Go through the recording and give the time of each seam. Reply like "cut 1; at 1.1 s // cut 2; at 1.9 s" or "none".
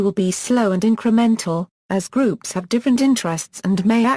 cut 1; at 1.0 s